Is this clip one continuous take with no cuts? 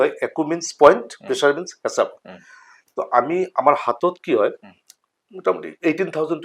yes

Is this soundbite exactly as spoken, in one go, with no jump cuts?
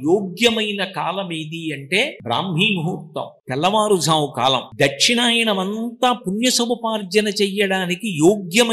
no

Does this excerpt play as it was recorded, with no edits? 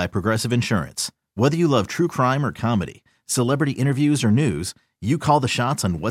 yes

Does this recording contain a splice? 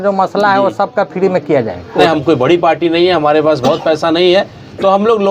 yes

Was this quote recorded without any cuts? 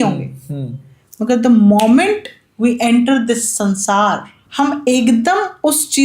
no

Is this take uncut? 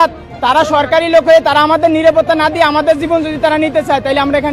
yes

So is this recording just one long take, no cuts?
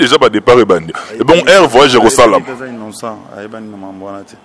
yes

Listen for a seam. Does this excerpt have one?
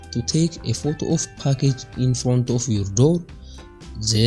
no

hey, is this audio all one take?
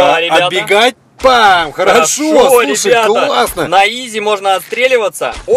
no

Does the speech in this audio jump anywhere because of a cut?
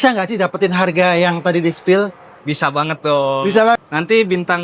yes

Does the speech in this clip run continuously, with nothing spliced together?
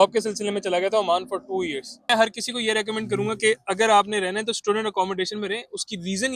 no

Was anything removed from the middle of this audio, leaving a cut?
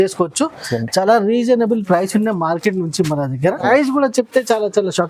yes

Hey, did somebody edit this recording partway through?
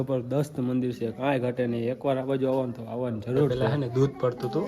yes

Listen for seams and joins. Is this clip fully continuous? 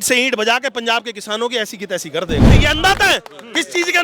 no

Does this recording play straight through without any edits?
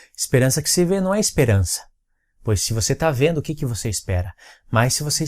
yes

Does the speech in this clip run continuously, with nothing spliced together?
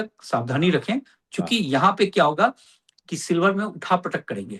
yes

